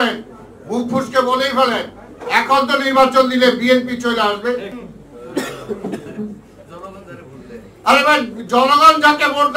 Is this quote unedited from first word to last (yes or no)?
yes